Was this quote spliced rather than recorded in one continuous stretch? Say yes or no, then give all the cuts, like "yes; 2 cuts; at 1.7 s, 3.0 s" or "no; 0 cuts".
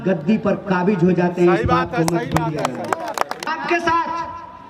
yes; 1 cut; at 3.5 s